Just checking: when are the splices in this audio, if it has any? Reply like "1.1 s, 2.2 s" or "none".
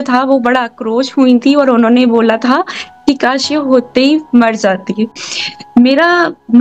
5.3 s